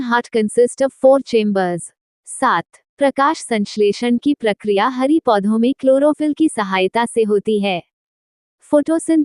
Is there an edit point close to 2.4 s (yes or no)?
yes